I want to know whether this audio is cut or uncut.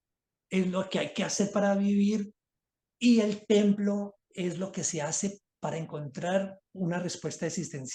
uncut